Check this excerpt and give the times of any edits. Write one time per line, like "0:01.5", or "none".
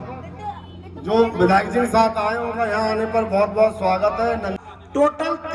0:04.6